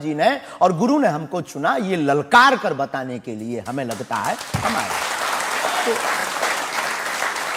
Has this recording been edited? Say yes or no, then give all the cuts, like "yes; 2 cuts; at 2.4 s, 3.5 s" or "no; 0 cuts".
no; 0 cuts